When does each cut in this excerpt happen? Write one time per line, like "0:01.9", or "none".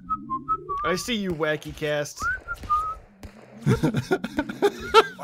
none

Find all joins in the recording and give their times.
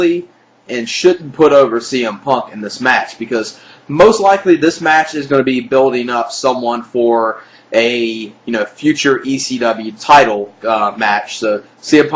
0:06.1

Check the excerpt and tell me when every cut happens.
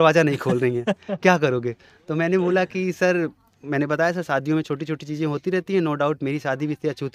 none

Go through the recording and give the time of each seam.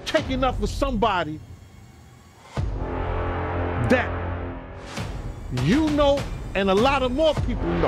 none

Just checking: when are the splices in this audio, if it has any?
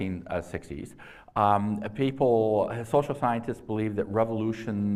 0:02.8

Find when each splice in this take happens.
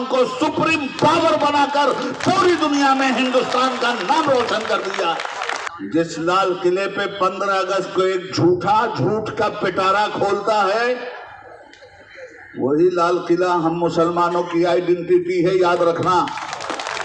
0:05.7

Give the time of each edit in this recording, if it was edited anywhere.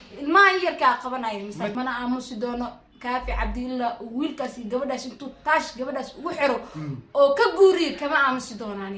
0:01.7

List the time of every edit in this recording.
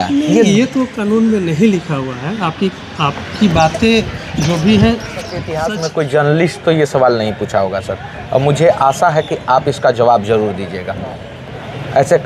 0:05.4

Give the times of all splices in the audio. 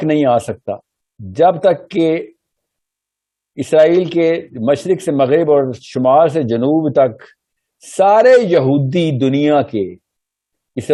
none

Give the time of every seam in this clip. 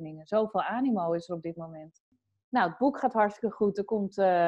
0:02.1

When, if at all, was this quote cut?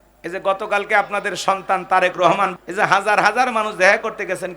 0:02.5

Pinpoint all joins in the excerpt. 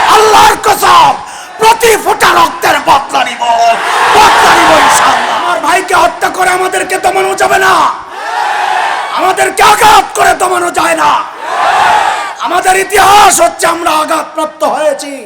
0:05.4

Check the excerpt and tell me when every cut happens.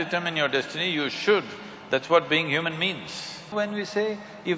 0:03.5

